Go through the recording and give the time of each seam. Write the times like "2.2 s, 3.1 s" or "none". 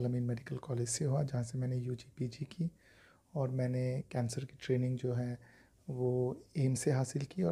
none